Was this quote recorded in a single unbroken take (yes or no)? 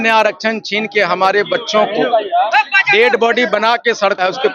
yes